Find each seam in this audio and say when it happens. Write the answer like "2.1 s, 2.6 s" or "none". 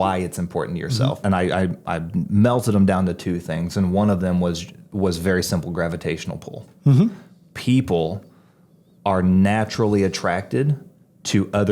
1.2 s